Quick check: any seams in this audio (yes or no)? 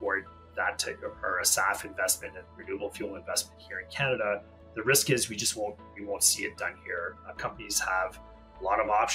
yes